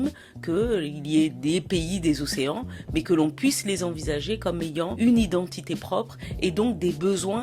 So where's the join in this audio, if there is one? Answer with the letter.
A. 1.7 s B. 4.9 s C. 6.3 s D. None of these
B